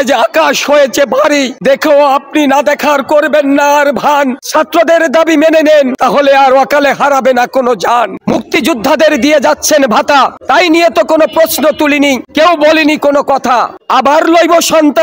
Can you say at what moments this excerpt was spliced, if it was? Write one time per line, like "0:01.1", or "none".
0:01.5
0:04.4
0:05.9
0:08.1
0:10.4
0:12.2
0:13.8